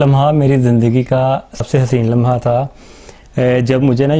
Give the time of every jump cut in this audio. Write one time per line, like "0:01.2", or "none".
0:01.5